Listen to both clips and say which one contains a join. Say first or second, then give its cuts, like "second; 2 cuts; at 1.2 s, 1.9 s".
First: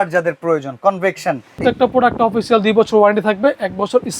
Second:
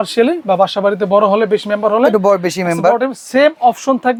first; 1 cut; at 1.6 s